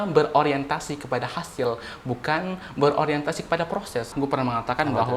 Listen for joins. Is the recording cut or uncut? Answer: cut